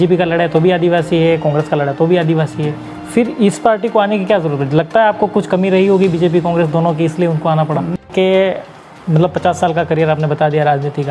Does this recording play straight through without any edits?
no; 1 cut; at 7.9 s

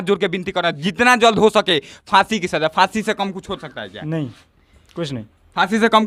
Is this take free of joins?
yes; 0 cuts

